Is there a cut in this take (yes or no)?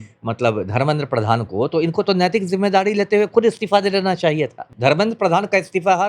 yes